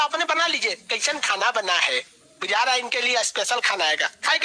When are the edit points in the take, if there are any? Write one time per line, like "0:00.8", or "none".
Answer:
none